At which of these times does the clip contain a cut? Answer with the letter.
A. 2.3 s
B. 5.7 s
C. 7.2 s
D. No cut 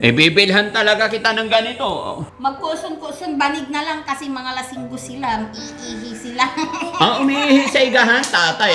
A